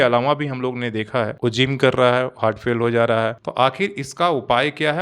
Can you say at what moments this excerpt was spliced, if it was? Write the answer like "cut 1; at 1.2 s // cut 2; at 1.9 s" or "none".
cut 1; at 1.4 s // cut 2; at 3.3 s